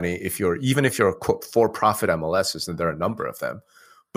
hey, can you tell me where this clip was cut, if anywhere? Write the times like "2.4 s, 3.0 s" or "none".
none